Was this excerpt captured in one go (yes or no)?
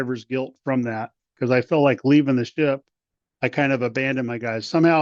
no